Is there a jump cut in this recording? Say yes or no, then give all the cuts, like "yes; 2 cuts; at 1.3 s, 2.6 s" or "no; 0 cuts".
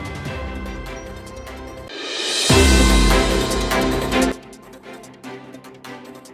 yes; 1 cut; at 4.3 s